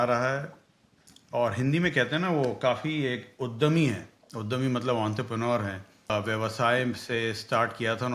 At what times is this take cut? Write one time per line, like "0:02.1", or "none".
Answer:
0:06.1